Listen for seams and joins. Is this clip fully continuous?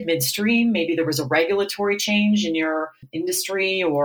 no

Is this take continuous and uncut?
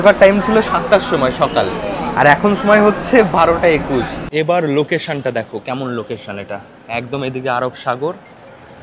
no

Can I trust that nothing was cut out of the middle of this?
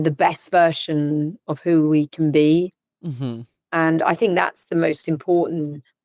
no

